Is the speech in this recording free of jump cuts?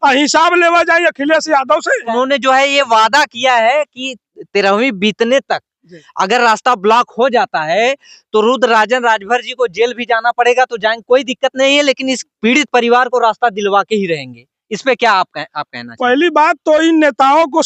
no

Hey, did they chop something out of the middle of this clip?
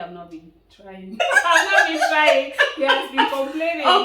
yes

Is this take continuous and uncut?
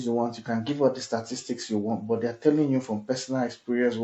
yes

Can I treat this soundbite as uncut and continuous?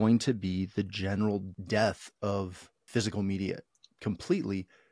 no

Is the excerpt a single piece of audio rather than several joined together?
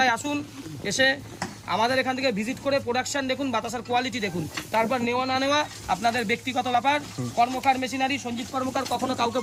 yes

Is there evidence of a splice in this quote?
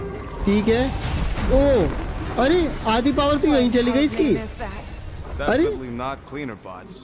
no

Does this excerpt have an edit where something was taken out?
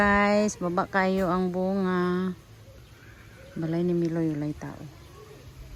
no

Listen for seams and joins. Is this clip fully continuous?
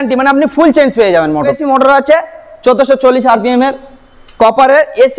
no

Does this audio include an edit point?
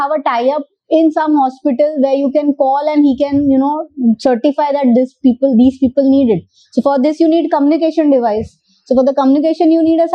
no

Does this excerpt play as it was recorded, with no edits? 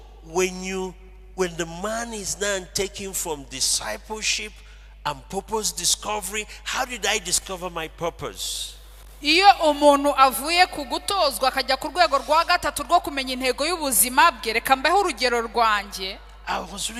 yes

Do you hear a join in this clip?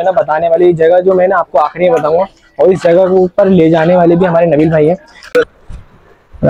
yes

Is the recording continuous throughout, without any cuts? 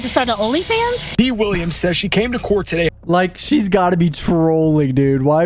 yes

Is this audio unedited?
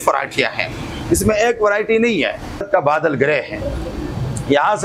no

